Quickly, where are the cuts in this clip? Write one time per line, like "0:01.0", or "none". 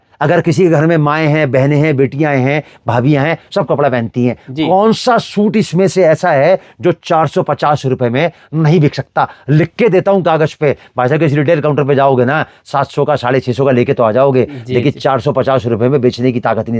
none